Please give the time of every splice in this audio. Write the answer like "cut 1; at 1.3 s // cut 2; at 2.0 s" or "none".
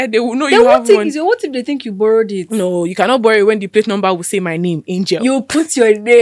none